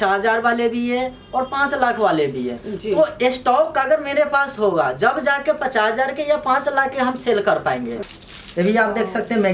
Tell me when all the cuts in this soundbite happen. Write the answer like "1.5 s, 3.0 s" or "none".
8.0 s